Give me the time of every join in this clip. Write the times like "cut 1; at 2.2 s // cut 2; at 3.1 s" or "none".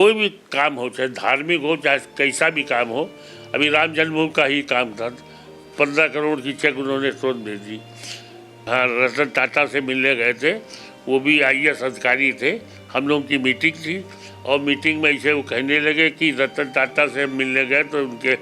cut 1; at 8.7 s